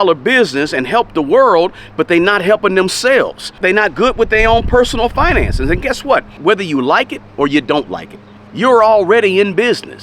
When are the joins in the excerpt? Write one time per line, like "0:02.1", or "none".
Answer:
0:06.4